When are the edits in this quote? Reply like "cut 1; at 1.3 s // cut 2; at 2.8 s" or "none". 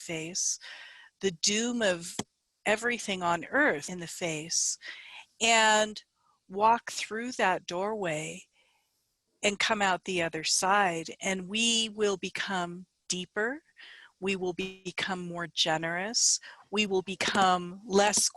cut 1; at 3.9 s